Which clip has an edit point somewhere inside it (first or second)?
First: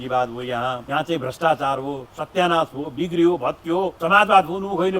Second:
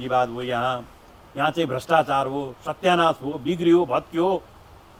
first